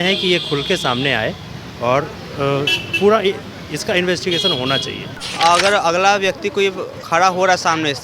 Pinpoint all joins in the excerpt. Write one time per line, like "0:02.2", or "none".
0:05.2